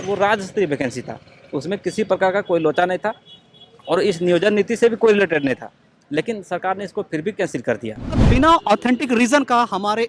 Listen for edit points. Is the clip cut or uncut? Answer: cut